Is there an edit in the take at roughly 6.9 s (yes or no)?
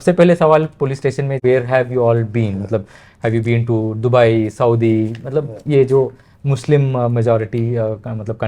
no